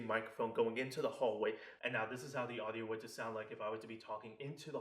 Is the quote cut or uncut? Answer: cut